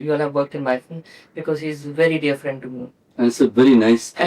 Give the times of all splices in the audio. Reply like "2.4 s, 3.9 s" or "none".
none